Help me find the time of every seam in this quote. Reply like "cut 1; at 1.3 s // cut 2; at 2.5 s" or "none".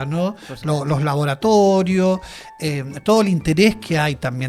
none